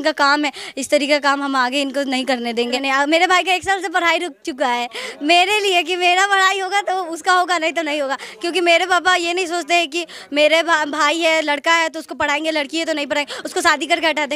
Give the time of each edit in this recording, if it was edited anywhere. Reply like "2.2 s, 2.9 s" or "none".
2.8 s